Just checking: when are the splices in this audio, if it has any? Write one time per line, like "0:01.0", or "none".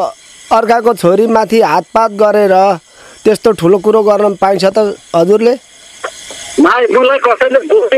none

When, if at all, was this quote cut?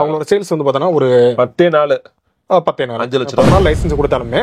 0:03.4

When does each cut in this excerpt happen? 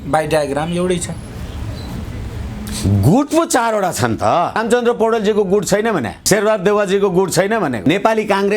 0:04.6
0:06.2
0:07.8

